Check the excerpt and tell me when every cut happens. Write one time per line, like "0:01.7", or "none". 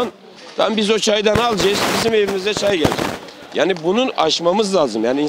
none